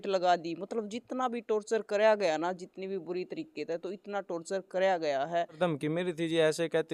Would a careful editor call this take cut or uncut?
cut